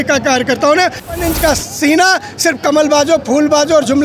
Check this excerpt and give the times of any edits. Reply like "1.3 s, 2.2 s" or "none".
1.1 s